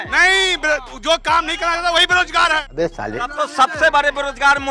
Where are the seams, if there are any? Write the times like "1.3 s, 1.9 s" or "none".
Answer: 2.8 s